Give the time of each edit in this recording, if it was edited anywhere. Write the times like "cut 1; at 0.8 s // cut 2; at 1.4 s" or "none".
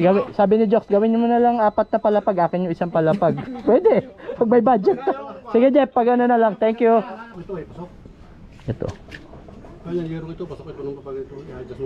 cut 1; at 7.4 s

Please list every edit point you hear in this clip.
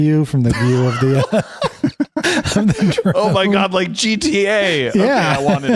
none

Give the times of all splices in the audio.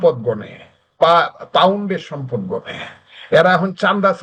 none

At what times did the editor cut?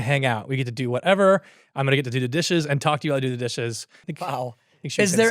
cut 1; at 4.0 s

